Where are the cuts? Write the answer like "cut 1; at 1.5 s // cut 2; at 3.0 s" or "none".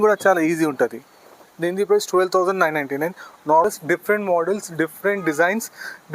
cut 1; at 1.1 s // cut 2; at 3.6 s